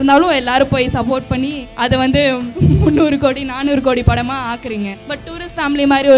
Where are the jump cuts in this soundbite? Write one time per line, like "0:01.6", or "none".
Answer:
0:01.6
0:02.5
0:05.0